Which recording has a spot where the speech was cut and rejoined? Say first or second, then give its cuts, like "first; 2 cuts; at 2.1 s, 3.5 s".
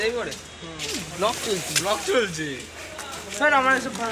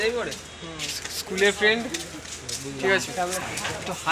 first; 1 cut; at 1.0 s